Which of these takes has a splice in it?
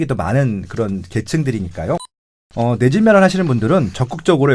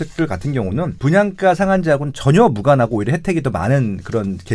second; 1 cut; at 0.9 s

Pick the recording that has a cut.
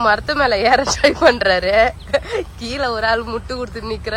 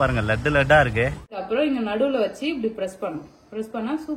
second; 1 cut; at 1.4 s

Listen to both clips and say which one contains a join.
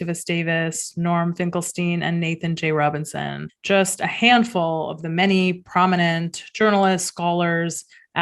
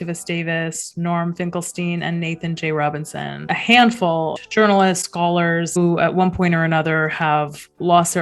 second; 3 cuts; at 3.5 s, 4.4 s, 5.8 s

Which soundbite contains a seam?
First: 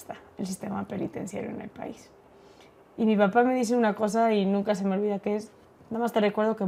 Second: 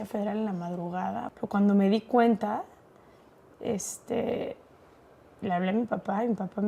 second; 1 cut; at 1.2 s

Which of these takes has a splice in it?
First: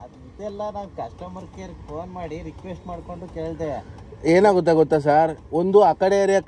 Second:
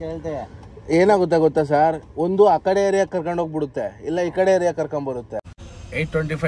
second; 1 cut; at 5.4 s

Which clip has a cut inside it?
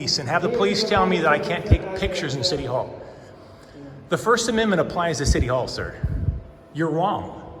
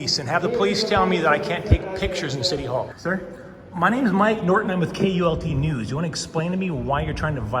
second; 1 cut; at 2.9 s

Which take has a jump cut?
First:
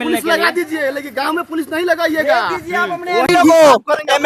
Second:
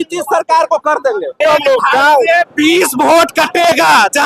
second; 1 cut; at 1.4 s

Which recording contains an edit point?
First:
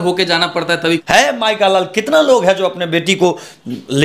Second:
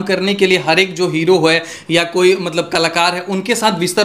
first; 1 cut; at 1.0 s

